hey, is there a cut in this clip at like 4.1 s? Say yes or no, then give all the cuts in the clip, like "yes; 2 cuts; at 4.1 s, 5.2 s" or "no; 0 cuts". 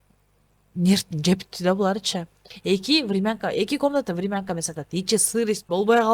no; 1 cut; at 2.5 s